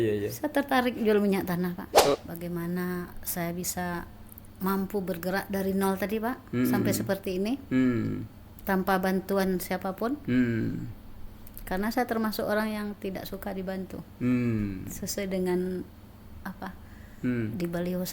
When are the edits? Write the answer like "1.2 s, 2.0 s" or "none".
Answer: 2.2 s